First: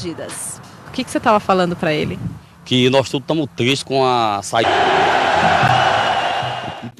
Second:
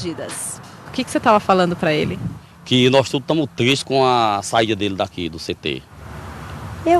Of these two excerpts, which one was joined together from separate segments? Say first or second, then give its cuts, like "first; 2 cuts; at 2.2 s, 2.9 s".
second; 1 cut; at 4.6 s